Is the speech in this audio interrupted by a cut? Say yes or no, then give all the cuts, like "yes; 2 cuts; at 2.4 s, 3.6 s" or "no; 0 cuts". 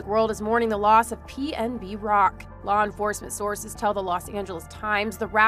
no; 0 cuts